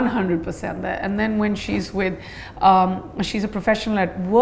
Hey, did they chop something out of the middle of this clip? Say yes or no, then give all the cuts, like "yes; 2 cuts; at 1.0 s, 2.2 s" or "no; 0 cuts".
no; 0 cuts